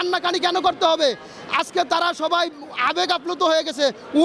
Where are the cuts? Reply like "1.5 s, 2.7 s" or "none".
none